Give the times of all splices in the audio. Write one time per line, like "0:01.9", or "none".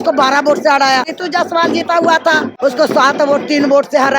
0:01.1
0:02.5